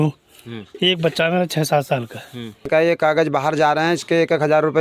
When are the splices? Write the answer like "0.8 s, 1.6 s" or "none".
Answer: 2.7 s